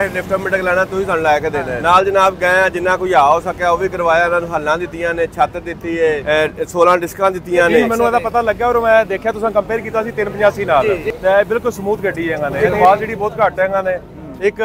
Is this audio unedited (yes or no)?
no